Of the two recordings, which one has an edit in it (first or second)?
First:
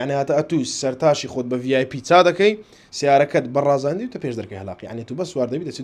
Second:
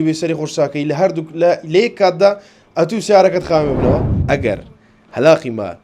second